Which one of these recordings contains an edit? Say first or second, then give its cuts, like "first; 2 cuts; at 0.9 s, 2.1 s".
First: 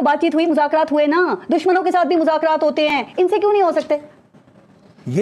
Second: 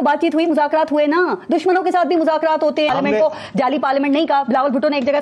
second; 1 cut; at 2.9 s